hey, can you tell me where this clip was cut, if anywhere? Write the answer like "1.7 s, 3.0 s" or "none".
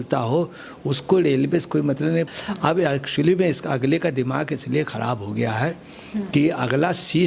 2.3 s